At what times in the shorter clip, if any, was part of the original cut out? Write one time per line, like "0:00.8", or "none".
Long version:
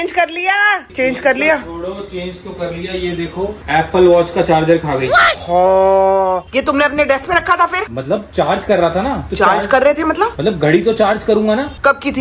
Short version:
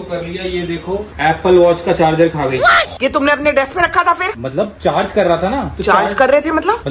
0:02.9